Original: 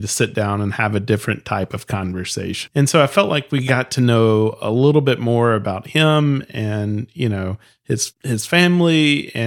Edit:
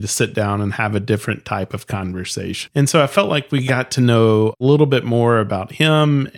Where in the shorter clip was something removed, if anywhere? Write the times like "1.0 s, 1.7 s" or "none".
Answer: 4.6 s